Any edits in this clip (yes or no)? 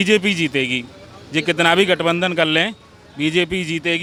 no